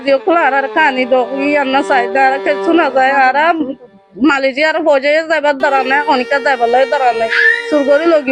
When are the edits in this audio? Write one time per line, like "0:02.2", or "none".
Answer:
none